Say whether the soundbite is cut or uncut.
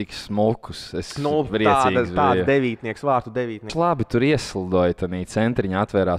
cut